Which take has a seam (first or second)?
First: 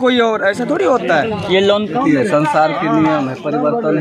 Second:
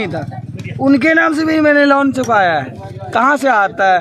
first